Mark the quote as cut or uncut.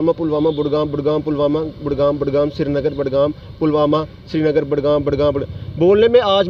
uncut